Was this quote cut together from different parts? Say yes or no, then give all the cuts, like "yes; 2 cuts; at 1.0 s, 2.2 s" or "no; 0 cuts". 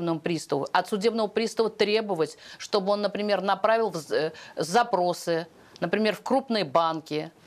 no; 0 cuts